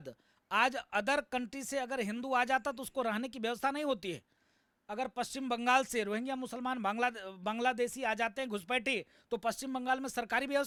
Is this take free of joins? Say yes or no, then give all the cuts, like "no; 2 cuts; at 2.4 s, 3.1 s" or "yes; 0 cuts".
yes; 0 cuts